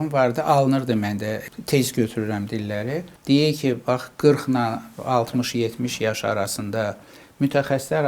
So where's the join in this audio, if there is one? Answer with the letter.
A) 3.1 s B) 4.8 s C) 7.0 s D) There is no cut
A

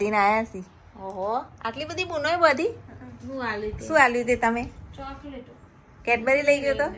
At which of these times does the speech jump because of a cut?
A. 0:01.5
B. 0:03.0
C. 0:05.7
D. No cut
D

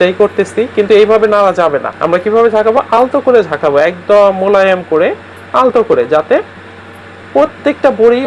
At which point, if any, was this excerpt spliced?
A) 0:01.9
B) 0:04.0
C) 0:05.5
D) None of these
A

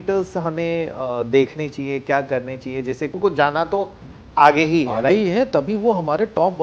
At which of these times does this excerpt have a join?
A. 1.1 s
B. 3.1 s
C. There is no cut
B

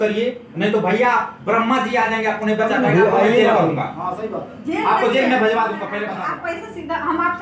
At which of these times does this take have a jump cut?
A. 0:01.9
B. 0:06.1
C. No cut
B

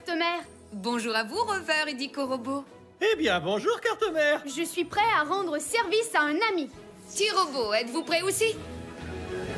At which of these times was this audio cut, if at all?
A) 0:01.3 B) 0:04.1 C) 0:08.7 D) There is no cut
C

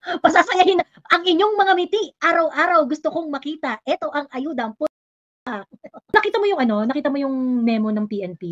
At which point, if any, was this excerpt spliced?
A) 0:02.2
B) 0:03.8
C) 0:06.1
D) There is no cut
C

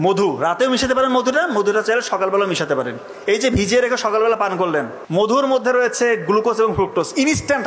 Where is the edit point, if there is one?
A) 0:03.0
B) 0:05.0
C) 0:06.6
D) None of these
B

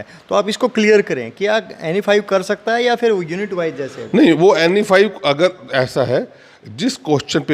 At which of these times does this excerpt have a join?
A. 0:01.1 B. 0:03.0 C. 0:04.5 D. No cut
D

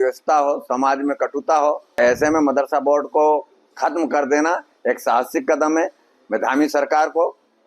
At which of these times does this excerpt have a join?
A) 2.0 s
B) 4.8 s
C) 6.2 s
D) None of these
A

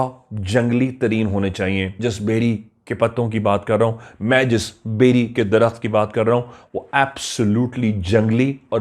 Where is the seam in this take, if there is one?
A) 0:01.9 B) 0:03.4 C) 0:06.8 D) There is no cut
A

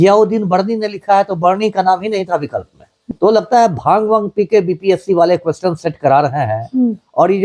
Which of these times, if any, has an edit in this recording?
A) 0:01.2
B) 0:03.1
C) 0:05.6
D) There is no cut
B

